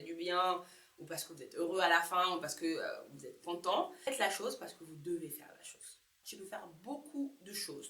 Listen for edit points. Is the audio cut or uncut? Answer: cut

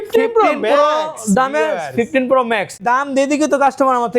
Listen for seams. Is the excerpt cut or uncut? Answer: cut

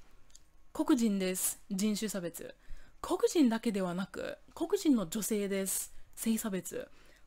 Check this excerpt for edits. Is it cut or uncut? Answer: uncut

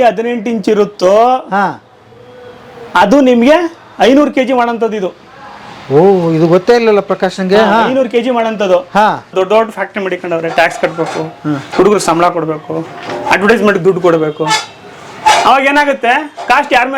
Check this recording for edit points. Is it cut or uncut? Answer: cut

